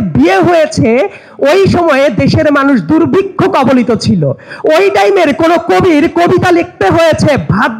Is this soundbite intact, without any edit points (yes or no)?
yes